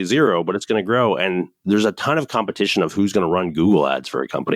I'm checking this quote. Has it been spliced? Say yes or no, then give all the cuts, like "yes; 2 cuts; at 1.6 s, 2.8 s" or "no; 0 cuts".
yes; 1 cut; at 1.5 s